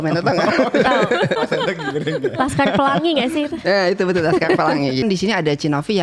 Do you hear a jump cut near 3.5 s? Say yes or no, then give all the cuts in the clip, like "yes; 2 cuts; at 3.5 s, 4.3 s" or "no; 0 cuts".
no; 1 cut; at 5.0 s